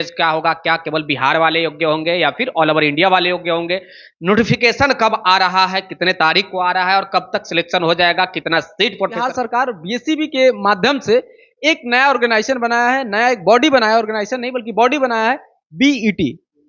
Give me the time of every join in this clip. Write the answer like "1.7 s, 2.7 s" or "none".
9.3 s